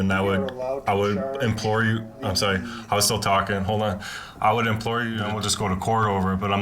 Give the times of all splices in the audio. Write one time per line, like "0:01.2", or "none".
0:05.3

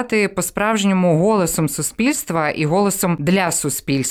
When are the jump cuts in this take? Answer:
0:03.2

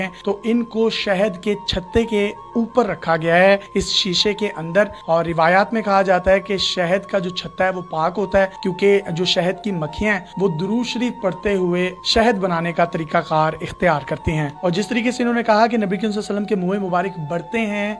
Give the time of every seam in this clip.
none

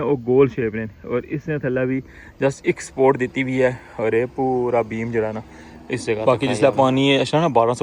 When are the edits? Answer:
0:06.2

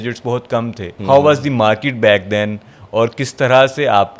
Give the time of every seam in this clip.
none

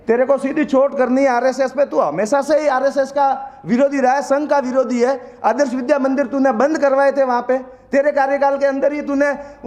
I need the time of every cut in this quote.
none

